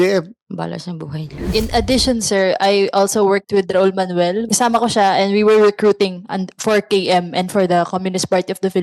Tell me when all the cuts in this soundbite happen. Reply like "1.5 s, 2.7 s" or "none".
1.5 s, 4.4 s